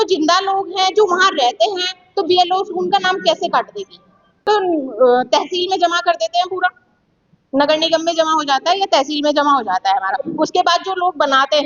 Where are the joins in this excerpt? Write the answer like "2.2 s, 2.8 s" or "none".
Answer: none